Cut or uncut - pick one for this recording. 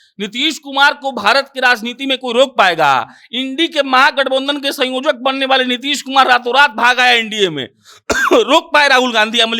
uncut